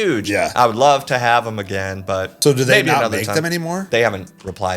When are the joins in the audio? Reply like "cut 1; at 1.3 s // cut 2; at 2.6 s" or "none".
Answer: cut 1; at 2.3 s // cut 2; at 3.8 s